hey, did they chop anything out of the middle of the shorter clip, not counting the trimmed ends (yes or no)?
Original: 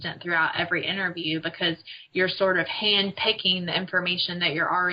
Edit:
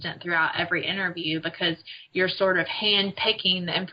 no